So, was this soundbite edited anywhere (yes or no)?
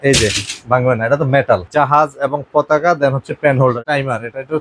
yes